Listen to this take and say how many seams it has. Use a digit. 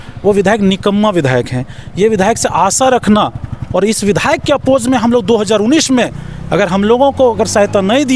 0